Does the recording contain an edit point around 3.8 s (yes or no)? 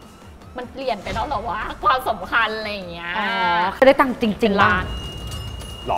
yes